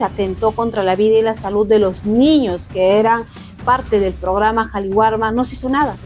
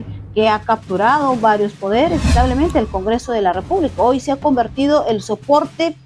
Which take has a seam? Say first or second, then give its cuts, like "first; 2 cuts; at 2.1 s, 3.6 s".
second; 1 cut; at 2.3 s